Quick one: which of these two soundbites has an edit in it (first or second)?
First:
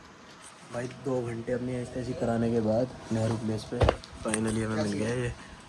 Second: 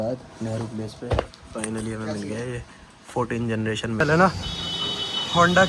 second